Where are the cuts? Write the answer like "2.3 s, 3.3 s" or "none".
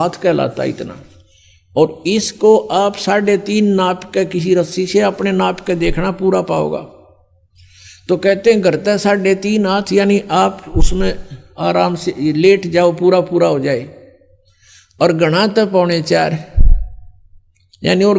none